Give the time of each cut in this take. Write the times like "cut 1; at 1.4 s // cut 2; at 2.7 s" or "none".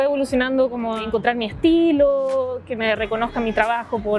cut 1; at 1.0 s